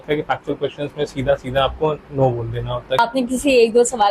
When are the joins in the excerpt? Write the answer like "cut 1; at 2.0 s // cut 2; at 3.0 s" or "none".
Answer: cut 1; at 3.0 s